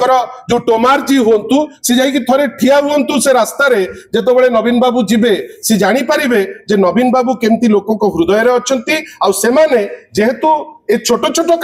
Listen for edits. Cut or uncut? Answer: uncut